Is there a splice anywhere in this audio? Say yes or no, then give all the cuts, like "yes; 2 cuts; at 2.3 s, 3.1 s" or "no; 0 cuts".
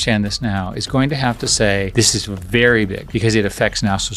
yes; 1 cut; at 3.0 s